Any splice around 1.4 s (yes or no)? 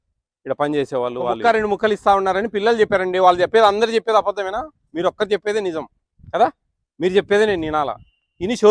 yes